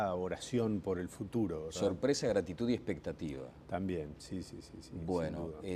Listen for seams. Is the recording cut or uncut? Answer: uncut